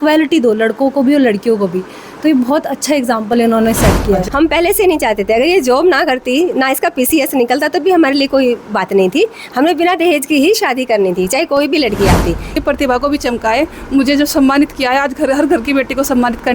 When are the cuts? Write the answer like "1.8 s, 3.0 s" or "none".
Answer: 4.3 s, 12.6 s